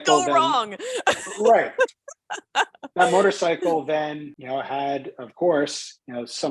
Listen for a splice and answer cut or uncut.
cut